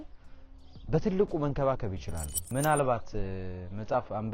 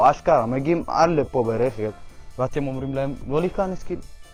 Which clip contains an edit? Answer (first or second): first